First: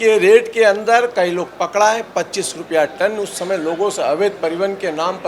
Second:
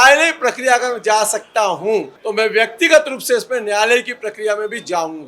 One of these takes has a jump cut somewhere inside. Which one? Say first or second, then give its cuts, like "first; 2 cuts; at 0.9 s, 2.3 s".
second; 1 cut; at 2.2 s